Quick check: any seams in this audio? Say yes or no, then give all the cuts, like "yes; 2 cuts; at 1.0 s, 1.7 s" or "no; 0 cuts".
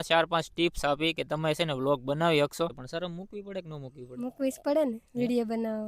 yes; 1 cut; at 2.8 s